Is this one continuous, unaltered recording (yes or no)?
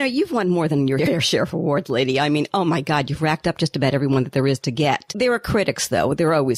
no